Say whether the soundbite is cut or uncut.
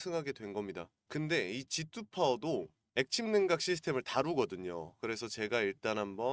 cut